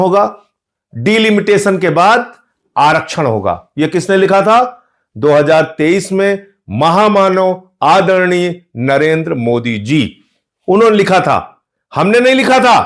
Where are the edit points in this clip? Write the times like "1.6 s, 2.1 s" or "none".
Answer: none